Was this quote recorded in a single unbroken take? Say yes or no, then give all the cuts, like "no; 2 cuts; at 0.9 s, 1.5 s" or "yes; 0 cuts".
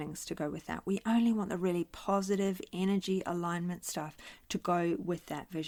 yes; 0 cuts